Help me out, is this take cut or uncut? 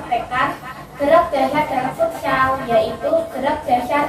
cut